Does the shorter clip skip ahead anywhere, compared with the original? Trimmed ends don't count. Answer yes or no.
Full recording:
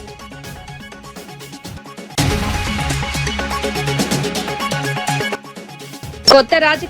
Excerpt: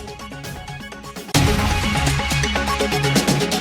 yes